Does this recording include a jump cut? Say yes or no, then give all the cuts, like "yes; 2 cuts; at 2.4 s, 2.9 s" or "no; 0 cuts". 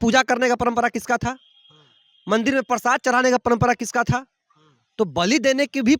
no; 0 cuts